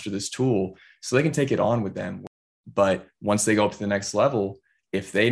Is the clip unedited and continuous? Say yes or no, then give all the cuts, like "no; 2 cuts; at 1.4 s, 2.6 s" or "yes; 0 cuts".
no; 1 cut; at 2.2 s